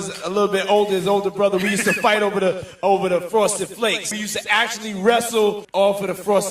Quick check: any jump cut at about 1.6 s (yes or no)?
no